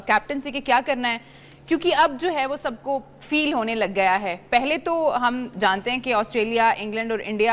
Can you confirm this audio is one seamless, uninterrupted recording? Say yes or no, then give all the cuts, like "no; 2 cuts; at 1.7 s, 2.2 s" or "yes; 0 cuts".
no; 1 cut; at 5.1 s